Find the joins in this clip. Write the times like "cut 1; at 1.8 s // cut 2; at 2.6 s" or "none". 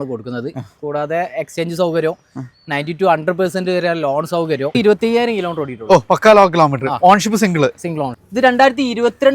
cut 1; at 4.8 s // cut 2; at 8.0 s